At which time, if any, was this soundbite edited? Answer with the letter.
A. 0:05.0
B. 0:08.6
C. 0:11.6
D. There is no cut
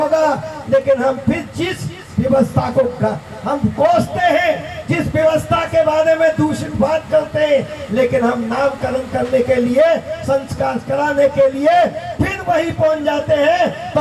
D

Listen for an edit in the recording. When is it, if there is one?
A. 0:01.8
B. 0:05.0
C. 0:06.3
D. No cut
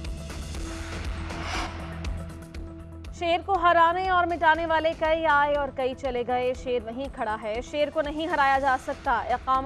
A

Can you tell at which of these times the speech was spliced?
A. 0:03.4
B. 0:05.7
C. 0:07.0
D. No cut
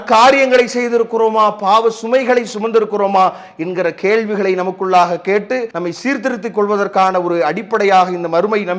B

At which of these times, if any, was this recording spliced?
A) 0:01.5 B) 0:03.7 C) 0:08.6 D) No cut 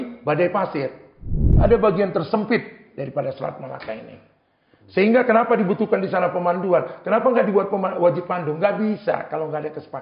A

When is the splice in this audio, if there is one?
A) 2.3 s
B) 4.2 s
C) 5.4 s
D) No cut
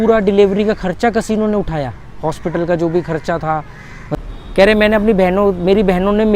B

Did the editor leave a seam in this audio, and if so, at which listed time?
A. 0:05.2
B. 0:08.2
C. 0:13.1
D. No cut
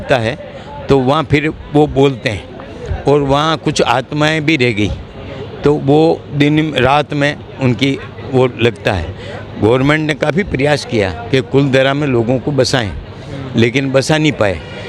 D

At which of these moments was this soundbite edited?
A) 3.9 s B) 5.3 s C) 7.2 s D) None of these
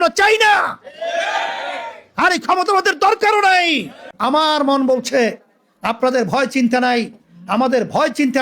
A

